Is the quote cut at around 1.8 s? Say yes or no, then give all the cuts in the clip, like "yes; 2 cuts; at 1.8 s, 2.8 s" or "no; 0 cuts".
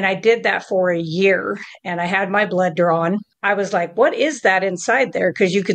no; 1 cut; at 3.3 s